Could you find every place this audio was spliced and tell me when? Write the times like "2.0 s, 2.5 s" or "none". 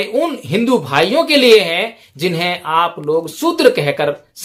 none